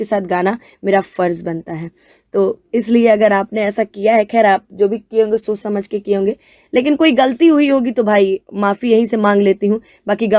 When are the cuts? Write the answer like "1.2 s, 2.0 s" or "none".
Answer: none